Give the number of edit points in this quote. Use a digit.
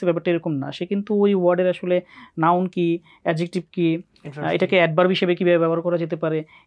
0